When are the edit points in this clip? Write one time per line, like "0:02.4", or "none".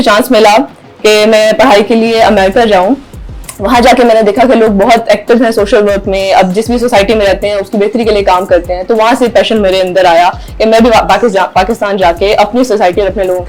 none